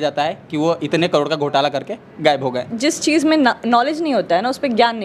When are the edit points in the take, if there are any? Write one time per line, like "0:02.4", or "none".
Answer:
0:02.7

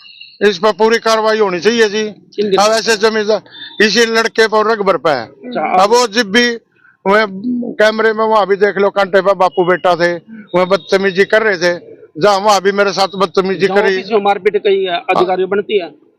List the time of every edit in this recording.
none

